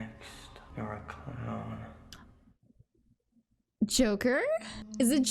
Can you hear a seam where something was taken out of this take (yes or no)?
yes